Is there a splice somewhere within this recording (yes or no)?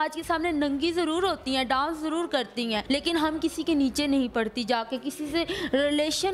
yes